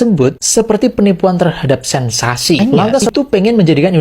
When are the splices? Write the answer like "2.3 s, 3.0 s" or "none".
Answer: 3.0 s

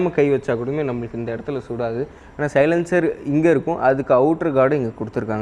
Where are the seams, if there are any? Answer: none

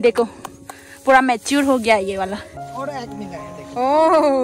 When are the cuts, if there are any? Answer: 2.5 s

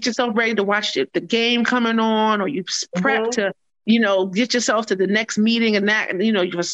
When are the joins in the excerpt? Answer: none

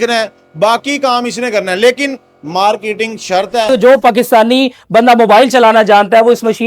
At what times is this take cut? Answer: 3.7 s

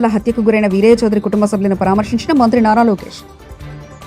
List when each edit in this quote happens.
none

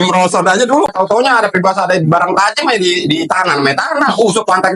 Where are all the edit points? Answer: 0.9 s

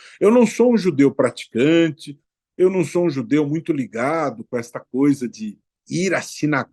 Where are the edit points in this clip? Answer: 5.8 s

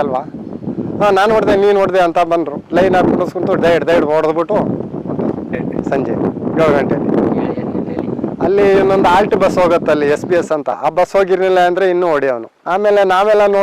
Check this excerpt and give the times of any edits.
none

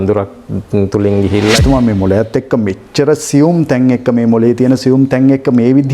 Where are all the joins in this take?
1.6 s

